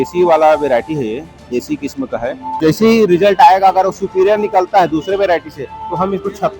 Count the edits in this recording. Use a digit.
1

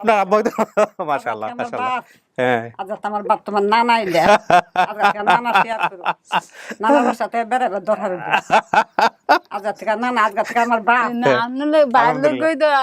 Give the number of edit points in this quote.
0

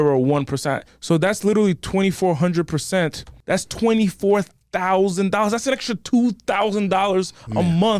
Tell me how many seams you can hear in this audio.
2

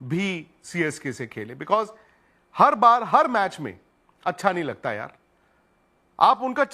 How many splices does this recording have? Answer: 0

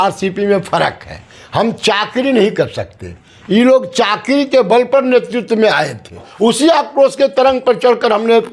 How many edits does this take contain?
1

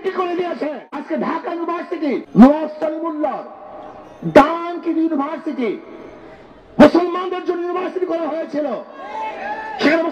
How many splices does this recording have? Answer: 2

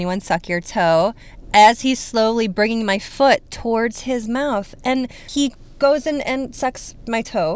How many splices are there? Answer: 1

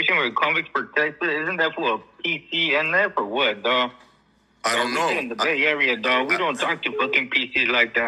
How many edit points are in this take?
0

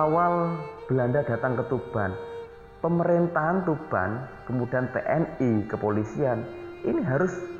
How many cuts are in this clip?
0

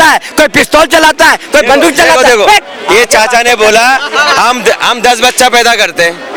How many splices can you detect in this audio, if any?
0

